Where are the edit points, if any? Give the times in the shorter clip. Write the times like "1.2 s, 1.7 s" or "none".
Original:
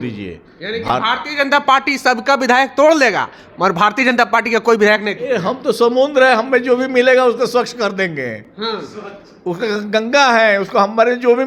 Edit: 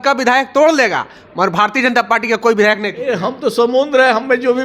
none